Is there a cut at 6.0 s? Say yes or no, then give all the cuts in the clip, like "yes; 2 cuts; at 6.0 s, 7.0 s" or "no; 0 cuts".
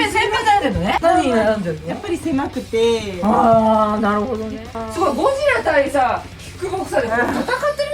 no; 1 cut; at 4.8 s